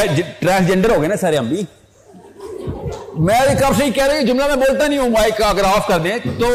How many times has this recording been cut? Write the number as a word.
zero